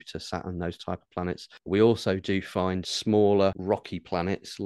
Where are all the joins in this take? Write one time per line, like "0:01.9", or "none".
0:01.5
0:02.9
0:03.6